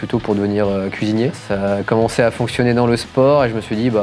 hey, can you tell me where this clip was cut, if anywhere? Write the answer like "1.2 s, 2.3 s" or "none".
none

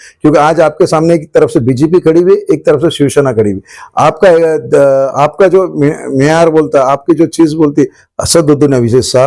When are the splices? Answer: 8.0 s

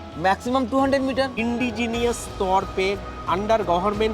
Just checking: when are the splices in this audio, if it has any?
1.4 s

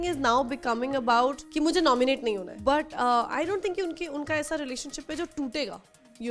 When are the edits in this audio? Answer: 1.4 s, 2.5 s

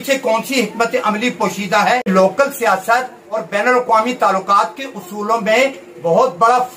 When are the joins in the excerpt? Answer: 2.1 s

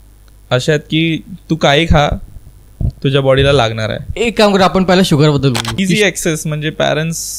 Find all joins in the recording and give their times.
5.7 s

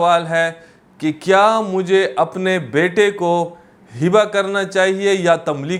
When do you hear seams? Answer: none

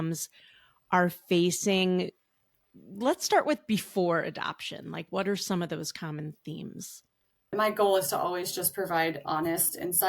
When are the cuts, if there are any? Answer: 7.5 s

